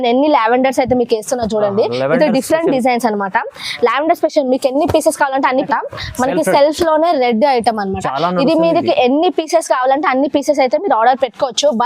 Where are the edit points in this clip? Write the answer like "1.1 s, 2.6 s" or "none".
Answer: 5.7 s